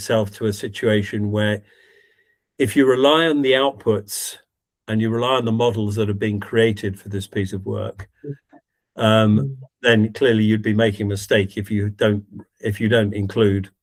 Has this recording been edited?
no; 0 cuts

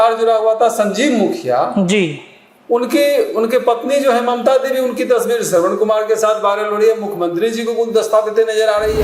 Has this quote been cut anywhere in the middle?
no; 0 cuts

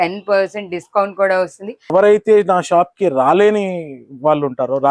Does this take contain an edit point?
yes; 1 cut; at 1.9 s

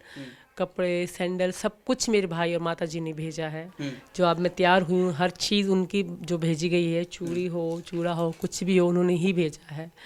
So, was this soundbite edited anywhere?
no; 0 cuts

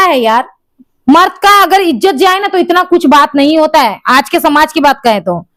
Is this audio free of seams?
yes; 0 cuts

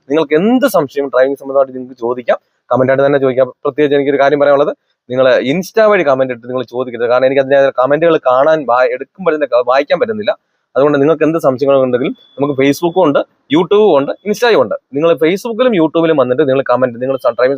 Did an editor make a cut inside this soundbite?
no; 0 cuts

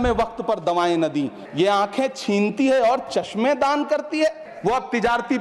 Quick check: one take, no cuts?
no; 2 cuts; at 1.4 s, 4.5 s

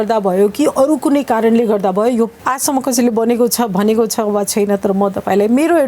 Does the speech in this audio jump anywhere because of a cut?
yes; 1 cut; at 2.4 s

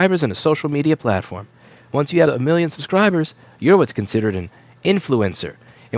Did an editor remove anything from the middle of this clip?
yes; 1 cut; at 2.3 s

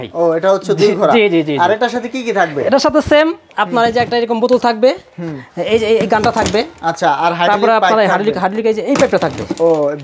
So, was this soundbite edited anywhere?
no; 0 cuts

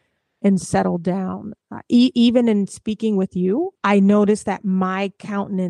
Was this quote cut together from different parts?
yes; 1 cut; at 3.8 s

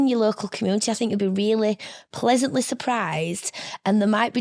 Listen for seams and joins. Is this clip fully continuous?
yes; 0 cuts

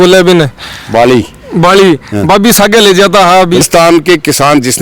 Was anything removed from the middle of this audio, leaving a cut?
yes; 1 cut; at 3.6 s

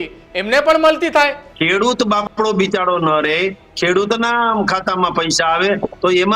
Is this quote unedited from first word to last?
no; 1 cut; at 1.4 s

